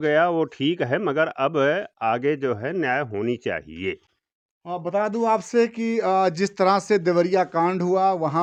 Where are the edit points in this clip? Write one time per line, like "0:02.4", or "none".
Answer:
none